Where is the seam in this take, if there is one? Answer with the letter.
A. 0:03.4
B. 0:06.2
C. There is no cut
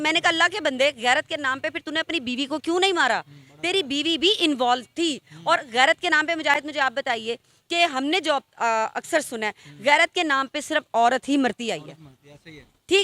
C